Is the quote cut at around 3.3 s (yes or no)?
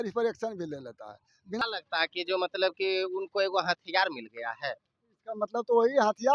no